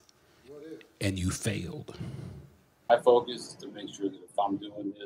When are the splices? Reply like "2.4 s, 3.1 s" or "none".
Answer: 2.9 s